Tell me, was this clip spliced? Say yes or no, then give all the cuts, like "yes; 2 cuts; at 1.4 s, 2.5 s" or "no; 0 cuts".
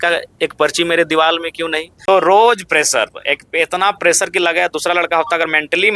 yes; 1 cut; at 1.9 s